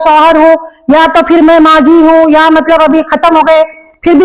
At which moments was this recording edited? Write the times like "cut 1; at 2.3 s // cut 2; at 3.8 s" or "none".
none